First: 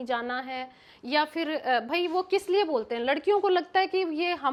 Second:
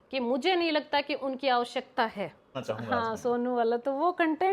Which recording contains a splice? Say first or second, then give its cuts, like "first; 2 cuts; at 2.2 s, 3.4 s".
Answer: second; 1 cut; at 2.6 s